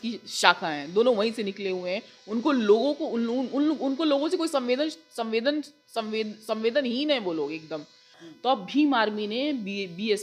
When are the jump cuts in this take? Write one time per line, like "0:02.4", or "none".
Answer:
0:08.2